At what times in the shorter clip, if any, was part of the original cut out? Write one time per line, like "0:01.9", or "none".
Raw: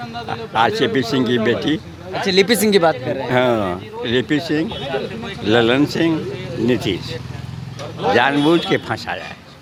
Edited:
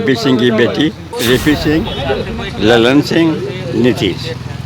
0:01.1